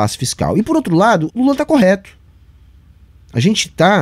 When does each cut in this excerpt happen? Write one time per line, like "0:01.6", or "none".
0:01.3